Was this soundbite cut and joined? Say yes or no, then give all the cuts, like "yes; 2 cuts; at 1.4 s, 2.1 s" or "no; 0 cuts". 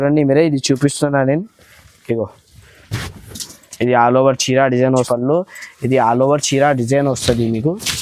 yes; 1 cut; at 5.1 s